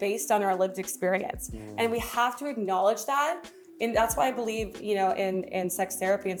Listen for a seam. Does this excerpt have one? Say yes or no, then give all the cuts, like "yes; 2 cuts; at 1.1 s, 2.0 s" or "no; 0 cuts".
no; 0 cuts